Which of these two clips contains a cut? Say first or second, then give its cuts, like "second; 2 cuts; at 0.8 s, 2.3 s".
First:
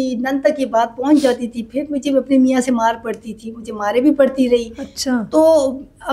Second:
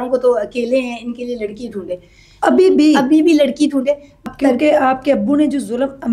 second; 1 cut; at 4.1 s